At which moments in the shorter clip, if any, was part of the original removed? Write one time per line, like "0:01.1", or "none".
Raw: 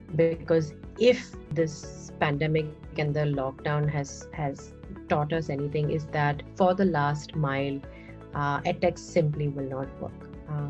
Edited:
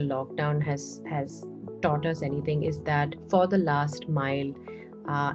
none

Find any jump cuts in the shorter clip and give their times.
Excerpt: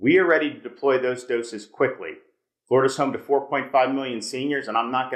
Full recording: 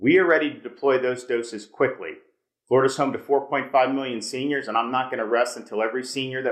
none

